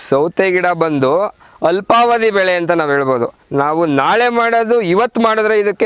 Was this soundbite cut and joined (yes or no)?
no